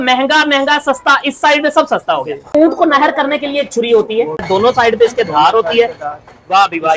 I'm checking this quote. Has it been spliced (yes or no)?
yes